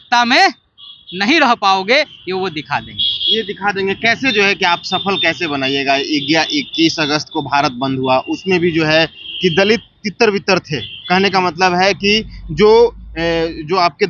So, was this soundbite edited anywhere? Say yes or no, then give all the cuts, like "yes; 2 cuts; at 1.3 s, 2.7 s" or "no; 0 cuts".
no; 0 cuts